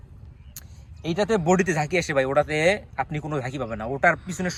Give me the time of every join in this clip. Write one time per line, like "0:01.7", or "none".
none